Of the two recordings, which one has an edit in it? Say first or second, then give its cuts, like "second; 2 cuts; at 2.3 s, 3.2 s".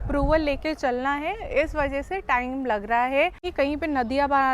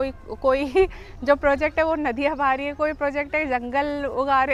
first; 1 cut; at 3.5 s